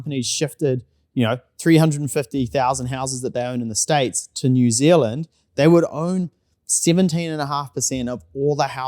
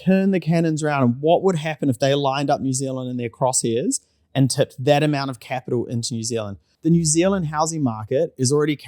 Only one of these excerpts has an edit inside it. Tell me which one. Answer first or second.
second